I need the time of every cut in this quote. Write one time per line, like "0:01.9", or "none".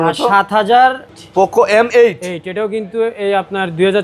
0:01.2